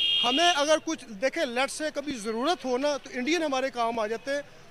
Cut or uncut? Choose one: uncut